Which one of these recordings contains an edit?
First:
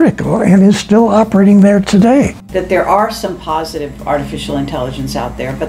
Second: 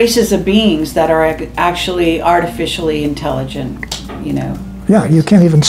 first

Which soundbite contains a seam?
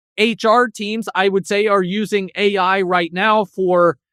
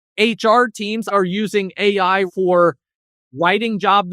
second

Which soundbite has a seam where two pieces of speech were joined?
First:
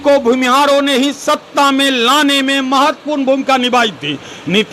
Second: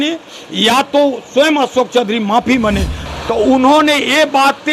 second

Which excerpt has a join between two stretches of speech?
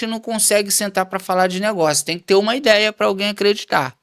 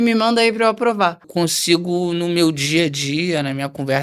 second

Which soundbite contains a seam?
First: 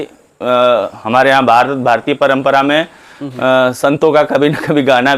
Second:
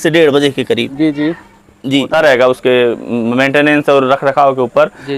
second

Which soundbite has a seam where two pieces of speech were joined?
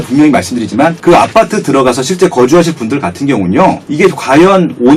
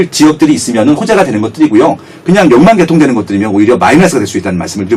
first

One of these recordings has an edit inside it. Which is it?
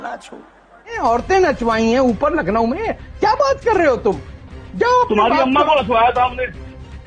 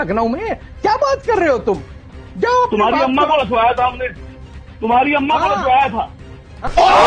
first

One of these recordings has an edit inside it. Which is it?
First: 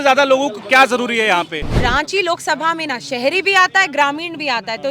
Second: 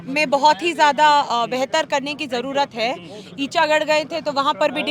first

